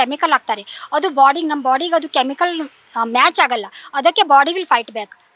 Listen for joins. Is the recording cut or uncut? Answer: uncut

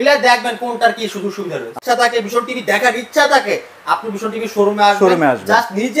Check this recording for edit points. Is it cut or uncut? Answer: cut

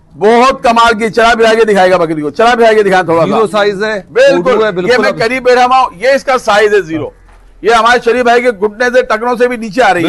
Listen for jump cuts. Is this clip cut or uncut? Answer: uncut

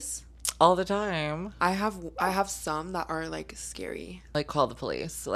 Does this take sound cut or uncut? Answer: uncut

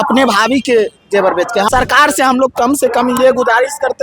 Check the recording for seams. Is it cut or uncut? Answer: cut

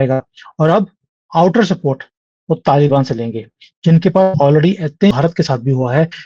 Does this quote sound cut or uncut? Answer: cut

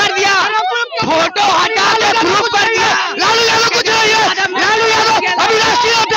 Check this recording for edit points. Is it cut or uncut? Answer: uncut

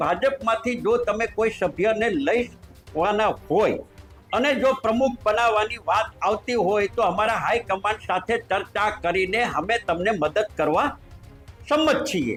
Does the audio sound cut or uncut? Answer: uncut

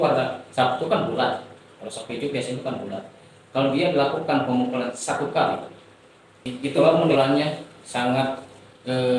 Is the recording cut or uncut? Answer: cut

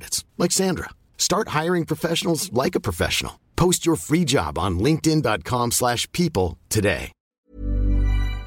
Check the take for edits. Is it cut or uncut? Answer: cut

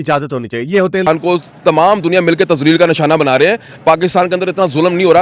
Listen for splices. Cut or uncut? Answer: cut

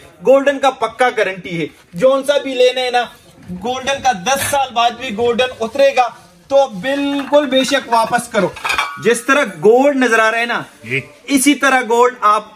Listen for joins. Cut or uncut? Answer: cut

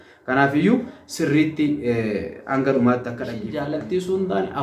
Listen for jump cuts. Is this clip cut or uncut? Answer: cut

